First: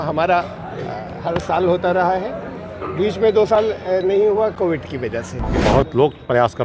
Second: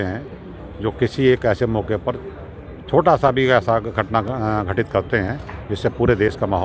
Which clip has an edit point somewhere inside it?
first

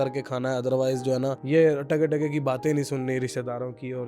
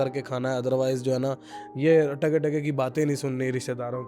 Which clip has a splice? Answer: first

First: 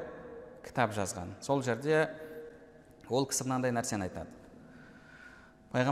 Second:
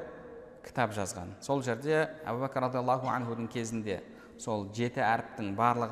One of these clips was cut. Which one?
second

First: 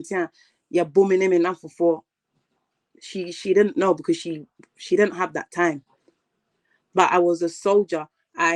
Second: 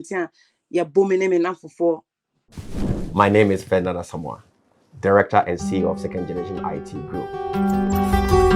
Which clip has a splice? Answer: first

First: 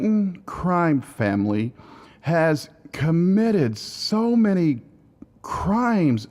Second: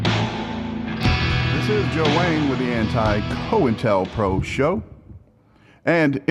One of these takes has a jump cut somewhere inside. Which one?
first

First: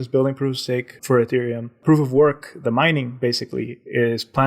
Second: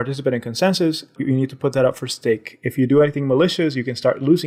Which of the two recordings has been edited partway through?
first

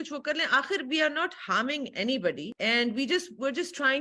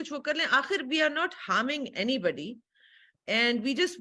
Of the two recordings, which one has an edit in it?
first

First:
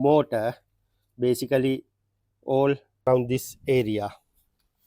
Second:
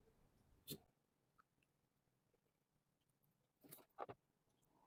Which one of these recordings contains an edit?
first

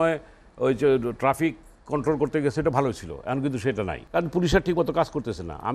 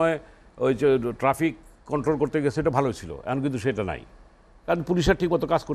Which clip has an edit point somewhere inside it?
first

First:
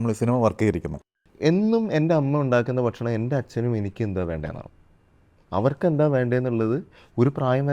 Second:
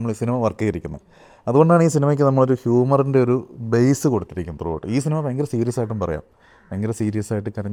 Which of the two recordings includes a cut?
first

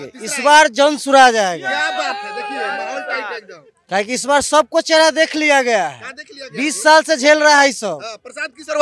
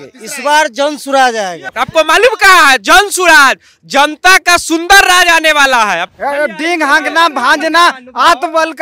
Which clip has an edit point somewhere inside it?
second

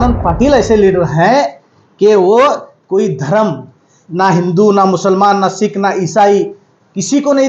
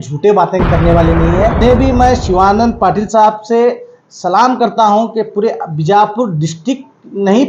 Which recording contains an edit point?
second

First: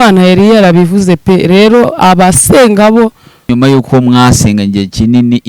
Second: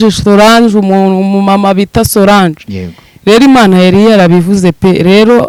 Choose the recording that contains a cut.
first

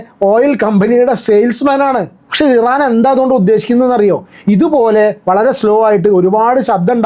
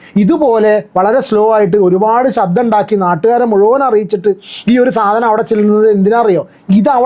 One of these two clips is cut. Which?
first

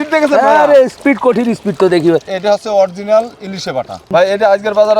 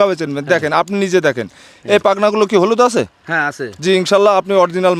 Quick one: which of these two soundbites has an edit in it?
first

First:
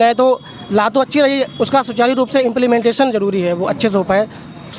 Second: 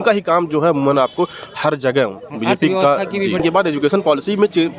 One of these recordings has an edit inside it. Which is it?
second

